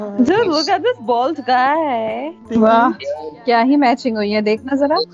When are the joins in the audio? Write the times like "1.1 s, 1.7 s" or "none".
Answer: 2.3 s